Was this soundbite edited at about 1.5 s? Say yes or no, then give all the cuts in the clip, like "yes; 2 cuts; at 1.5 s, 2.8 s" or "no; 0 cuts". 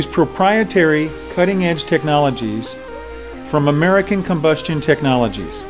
no; 1 cut; at 4.7 s